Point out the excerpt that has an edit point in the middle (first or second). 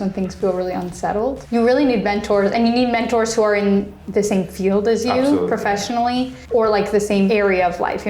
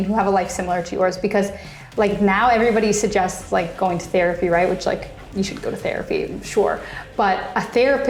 first